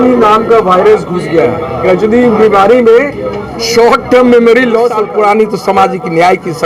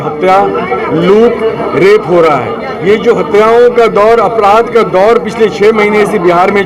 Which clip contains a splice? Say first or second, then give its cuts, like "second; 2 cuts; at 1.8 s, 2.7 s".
first; 1 cut; at 5.0 s